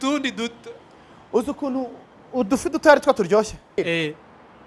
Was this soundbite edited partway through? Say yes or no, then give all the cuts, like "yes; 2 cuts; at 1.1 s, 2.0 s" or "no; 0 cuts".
yes; 1 cut; at 3.8 s